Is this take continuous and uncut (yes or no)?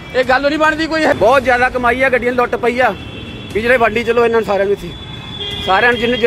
no